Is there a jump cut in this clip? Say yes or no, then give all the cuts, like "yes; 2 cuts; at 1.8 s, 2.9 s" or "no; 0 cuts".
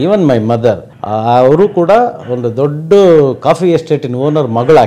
yes; 1 cut; at 0.9 s